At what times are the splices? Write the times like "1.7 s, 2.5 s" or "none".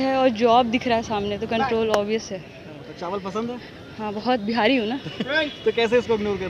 none